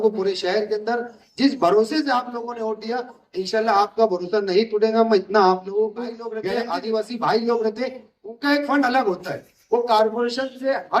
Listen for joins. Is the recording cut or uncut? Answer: cut